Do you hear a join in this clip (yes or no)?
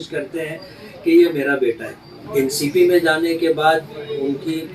yes